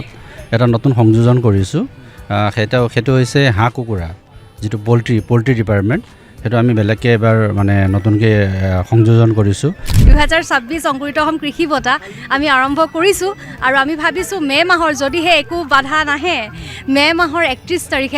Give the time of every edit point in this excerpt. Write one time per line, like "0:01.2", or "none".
0:10.1